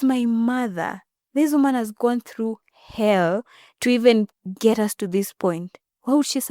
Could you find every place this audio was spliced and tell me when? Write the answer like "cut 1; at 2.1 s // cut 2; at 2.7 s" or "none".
none